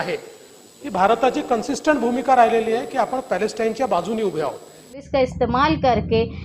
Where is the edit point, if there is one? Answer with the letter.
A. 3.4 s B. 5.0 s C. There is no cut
B